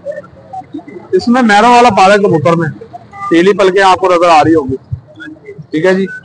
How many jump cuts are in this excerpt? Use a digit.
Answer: 0